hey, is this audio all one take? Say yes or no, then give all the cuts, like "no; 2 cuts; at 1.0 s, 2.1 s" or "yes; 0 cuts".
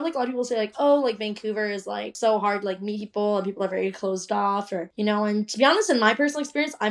no; 1 cut; at 2.1 s